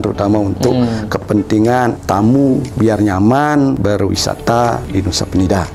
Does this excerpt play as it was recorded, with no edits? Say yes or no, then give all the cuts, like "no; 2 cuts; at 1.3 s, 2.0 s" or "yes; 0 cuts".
no; 4 cuts; at 2.0 s, 2.7 s, 3.8 s, 4.8 s